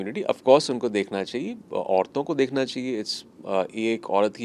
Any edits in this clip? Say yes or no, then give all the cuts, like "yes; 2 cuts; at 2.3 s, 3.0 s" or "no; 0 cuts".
no; 0 cuts